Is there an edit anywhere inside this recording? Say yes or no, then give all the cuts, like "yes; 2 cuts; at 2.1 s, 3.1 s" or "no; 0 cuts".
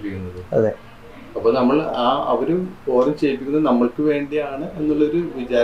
no; 0 cuts